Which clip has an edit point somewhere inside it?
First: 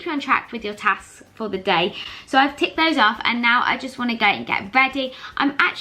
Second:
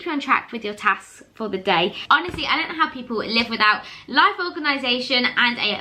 second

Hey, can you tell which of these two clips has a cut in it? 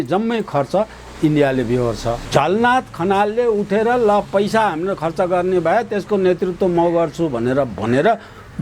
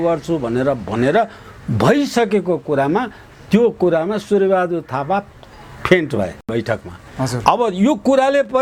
first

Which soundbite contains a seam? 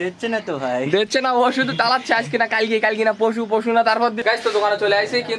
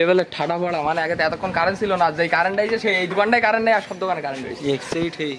first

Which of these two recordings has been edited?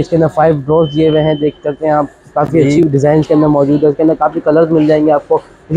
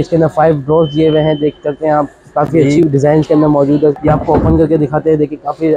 second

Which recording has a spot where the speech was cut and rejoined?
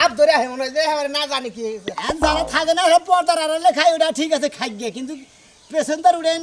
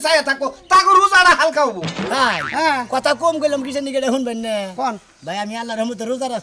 second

